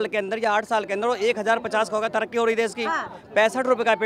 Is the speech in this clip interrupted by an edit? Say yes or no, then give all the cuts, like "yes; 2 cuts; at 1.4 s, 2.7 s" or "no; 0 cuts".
no; 0 cuts